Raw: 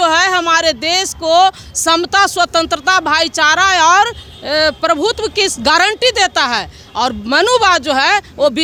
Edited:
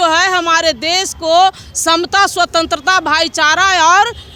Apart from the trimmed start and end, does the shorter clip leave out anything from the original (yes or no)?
no